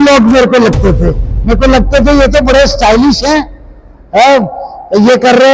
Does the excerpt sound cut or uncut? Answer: uncut